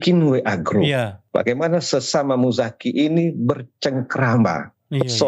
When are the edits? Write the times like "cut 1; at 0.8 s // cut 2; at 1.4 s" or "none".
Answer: cut 1; at 1.2 s